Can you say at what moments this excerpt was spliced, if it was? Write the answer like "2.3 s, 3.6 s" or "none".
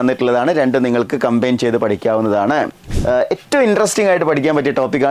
2.9 s

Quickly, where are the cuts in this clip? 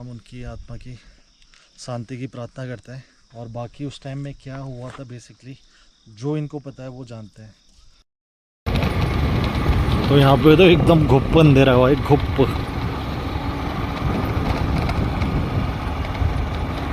8.3 s

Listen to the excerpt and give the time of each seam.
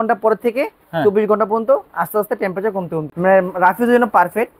3.1 s

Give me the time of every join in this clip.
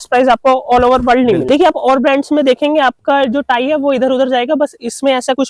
1.4 s

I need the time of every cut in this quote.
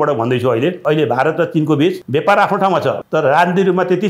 0.8 s, 2.0 s, 3.0 s

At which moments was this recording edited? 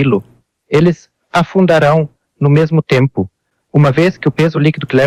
none

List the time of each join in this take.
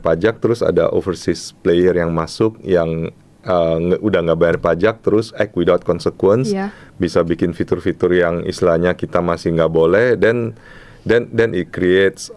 none

